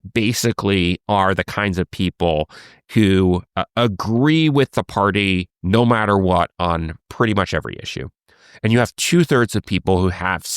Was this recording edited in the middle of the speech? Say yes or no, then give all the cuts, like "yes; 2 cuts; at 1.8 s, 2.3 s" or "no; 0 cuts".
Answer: yes; 1 cut; at 2.9 s